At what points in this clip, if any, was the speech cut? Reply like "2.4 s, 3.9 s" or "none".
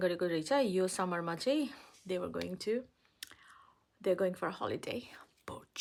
none